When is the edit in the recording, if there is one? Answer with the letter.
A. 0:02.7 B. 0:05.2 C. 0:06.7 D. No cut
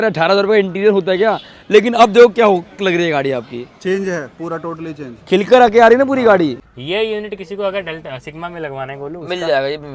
C